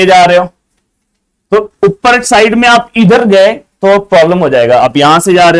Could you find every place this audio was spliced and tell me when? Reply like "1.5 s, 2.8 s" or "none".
none

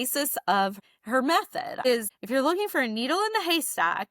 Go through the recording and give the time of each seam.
0.8 s, 1.9 s

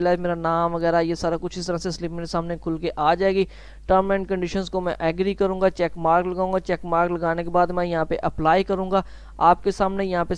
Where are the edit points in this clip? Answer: none

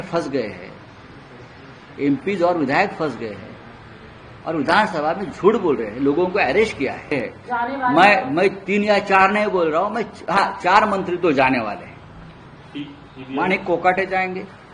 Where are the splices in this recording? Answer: 7.1 s

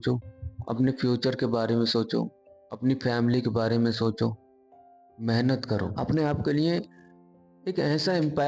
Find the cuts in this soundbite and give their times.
5.9 s

